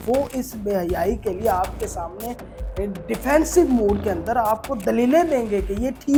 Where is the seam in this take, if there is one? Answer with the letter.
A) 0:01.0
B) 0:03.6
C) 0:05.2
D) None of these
D